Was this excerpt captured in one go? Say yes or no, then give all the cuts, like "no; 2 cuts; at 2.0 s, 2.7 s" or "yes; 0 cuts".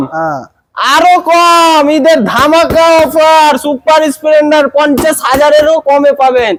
yes; 0 cuts